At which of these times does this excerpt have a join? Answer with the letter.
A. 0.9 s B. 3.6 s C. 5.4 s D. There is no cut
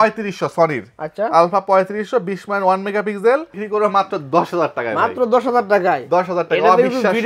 B